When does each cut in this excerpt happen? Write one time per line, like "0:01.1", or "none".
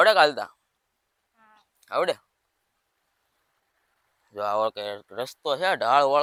none